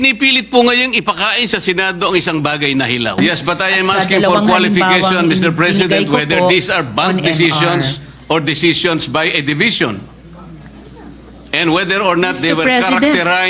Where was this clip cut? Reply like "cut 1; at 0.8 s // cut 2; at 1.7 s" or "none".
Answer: cut 1; at 3.2 s